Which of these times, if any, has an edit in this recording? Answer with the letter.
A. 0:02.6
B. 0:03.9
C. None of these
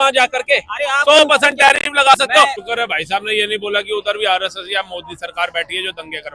A